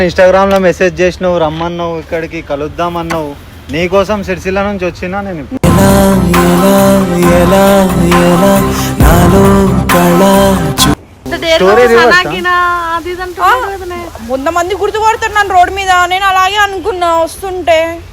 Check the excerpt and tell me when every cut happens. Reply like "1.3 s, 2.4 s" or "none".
11.2 s